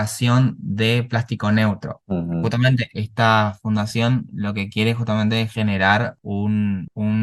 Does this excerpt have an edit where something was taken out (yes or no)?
no